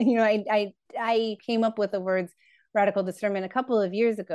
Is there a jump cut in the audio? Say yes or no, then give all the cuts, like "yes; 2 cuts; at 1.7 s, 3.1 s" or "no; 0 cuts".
yes; 1 cut; at 1.4 s